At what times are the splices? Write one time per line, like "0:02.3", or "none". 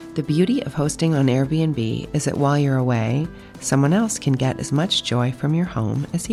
none